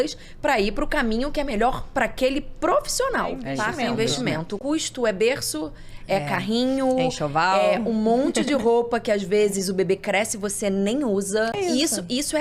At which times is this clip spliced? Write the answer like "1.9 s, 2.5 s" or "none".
3.4 s, 4.5 s, 11.5 s